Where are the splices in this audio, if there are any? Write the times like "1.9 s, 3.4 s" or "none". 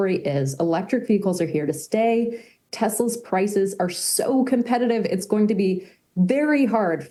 none